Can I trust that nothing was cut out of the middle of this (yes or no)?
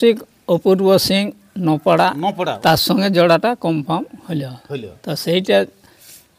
no